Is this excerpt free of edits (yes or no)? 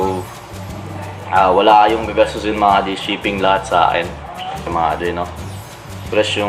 no